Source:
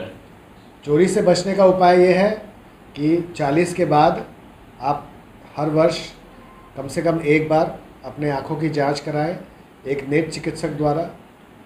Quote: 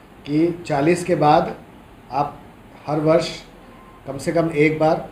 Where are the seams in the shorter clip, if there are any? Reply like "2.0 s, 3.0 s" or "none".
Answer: none